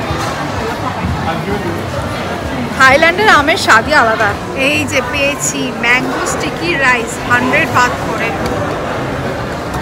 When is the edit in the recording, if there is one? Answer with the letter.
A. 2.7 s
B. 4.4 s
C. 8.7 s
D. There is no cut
B